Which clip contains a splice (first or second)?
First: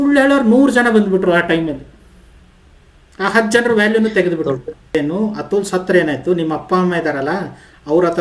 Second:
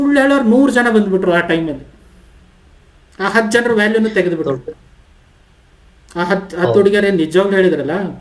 first